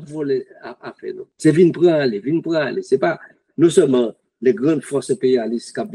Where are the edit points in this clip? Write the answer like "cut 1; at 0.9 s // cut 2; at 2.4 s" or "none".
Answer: cut 1; at 1.3 s